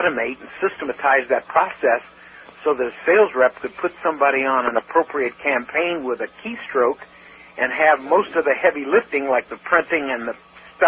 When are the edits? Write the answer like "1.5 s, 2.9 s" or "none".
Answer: none